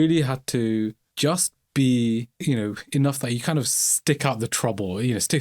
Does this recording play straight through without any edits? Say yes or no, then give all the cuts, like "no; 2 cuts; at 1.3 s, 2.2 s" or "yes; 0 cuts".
yes; 0 cuts